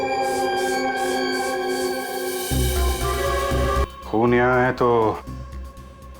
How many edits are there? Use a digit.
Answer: 1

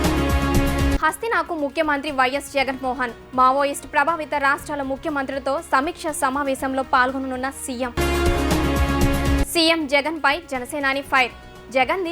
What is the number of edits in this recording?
1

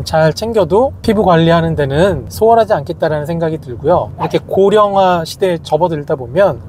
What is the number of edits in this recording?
2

